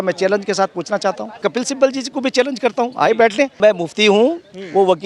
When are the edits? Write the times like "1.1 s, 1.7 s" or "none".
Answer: 1.5 s, 3.6 s